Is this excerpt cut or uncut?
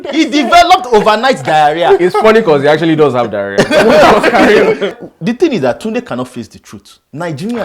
cut